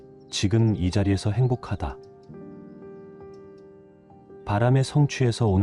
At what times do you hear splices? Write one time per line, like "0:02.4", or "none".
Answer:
0:01.9
0:04.1

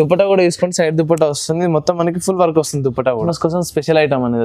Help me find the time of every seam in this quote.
0:03.3

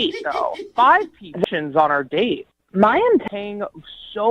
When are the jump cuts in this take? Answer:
0:01.4
0:03.2

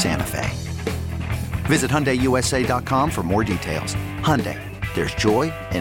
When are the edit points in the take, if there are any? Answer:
none

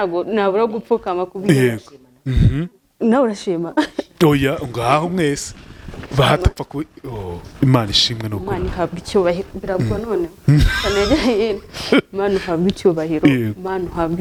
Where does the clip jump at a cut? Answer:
none

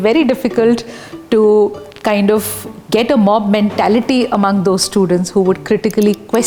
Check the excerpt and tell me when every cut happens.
none

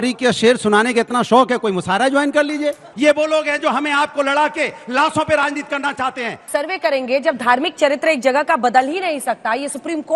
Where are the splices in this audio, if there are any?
0:06.5

